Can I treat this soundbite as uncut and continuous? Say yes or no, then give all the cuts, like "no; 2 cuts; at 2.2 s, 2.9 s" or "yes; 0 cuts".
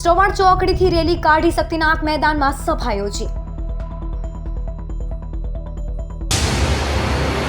no; 1 cut; at 6.3 s